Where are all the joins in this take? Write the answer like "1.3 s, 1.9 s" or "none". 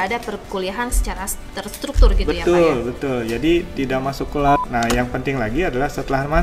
4.6 s